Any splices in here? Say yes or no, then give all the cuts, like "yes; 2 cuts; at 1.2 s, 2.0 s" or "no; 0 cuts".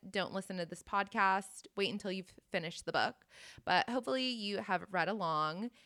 no; 0 cuts